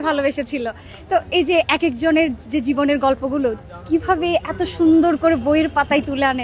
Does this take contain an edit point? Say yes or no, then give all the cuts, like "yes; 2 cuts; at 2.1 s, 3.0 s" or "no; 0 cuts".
no; 0 cuts